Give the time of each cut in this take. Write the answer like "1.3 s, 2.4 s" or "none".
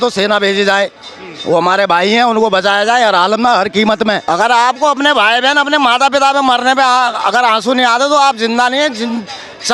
4.2 s